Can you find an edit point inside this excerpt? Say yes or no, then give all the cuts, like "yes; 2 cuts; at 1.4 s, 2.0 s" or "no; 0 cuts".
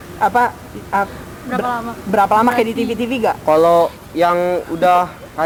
no; 0 cuts